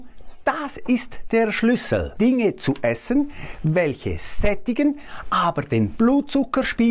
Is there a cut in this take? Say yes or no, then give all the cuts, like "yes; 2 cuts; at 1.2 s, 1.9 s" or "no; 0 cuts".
no; 0 cuts